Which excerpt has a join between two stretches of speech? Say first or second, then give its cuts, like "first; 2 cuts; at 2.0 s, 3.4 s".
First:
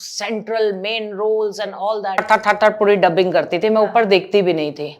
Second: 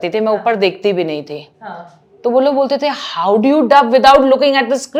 first; 1 cut; at 2.2 s